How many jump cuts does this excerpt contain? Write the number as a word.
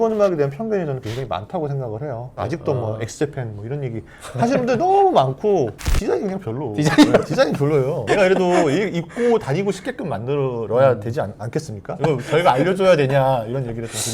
three